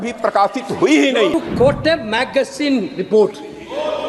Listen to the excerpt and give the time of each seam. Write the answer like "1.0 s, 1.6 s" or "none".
1.3 s